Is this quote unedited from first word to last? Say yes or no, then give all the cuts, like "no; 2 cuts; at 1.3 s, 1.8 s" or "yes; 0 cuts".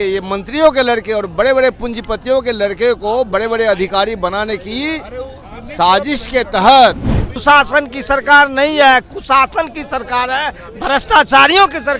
no; 1 cut; at 7.3 s